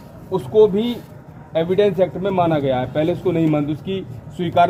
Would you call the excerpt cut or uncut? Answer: uncut